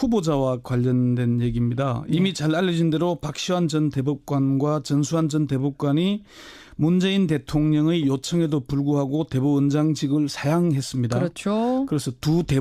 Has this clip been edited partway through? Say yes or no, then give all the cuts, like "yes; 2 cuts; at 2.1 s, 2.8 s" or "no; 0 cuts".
no; 0 cuts